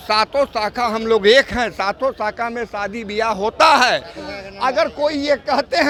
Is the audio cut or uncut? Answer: uncut